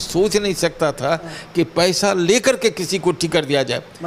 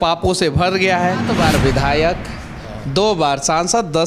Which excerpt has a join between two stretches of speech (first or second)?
second